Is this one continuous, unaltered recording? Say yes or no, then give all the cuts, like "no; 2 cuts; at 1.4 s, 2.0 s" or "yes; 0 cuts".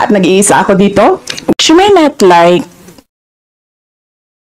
no; 1 cut; at 1.3 s